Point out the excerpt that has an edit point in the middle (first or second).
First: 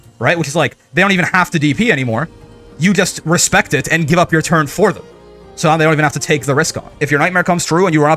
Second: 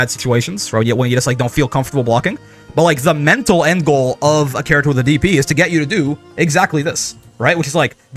first